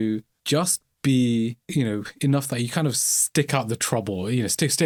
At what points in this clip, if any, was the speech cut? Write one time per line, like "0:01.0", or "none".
none